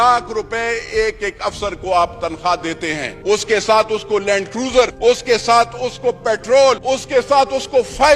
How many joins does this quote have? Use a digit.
3